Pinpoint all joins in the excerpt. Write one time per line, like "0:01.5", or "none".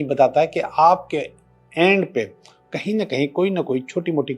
none